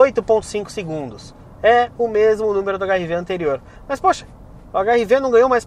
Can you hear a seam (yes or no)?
no